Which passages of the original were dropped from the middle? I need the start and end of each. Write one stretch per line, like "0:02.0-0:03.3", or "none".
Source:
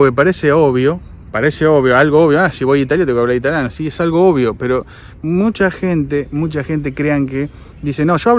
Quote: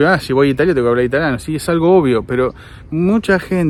none